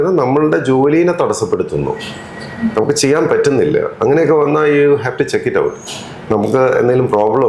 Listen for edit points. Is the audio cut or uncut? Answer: uncut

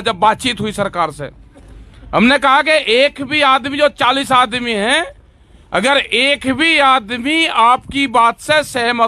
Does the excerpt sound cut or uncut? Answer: uncut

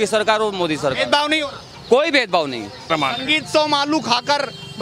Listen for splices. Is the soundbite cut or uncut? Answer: cut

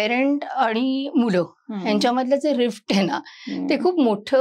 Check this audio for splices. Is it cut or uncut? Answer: uncut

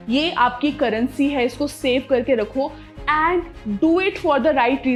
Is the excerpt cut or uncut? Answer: uncut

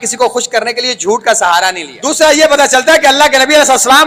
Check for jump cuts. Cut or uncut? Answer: cut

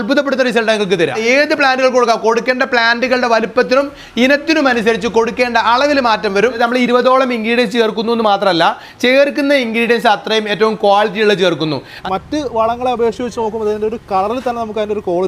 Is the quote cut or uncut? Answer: cut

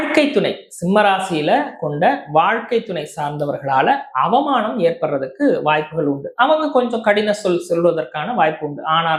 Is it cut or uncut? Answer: uncut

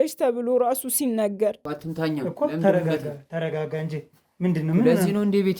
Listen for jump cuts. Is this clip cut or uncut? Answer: cut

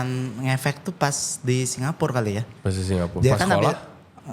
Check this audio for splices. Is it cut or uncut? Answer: uncut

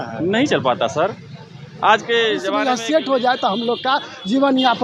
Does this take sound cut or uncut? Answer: cut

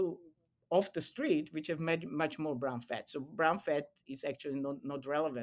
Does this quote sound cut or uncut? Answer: uncut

